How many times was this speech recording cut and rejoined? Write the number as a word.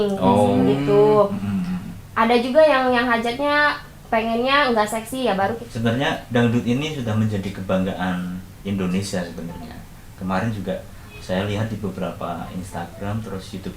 one